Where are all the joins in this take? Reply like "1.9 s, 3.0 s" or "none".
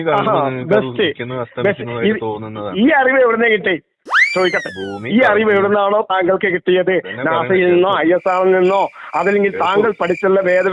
none